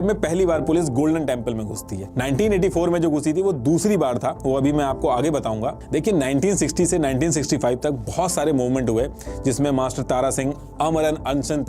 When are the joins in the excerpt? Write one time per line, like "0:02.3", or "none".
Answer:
none